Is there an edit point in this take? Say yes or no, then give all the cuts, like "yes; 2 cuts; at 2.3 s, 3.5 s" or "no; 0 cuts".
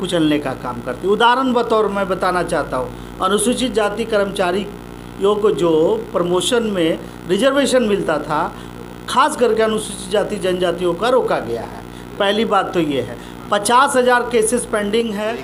no; 0 cuts